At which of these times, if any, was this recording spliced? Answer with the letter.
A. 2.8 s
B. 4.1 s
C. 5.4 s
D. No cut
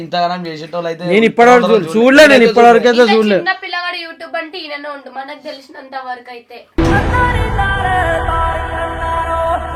D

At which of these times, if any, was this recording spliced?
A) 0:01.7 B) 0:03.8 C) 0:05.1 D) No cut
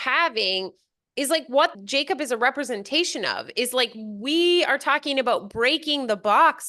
A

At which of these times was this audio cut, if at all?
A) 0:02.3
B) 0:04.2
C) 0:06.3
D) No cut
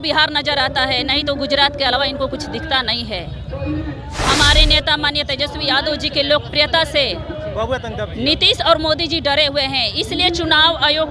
B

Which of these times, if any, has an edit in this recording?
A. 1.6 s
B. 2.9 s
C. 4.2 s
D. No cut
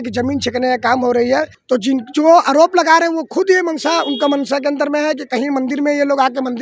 A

